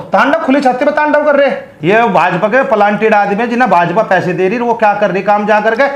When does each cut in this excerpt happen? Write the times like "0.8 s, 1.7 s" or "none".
1.8 s